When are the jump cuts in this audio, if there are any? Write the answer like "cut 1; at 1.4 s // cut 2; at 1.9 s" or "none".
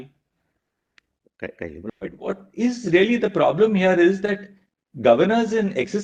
cut 1; at 1.9 s